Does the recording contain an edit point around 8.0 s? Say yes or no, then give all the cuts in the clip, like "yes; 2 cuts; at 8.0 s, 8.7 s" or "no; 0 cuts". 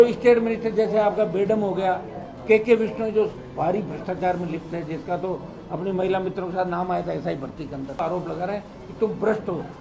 yes; 1 cut; at 8.0 s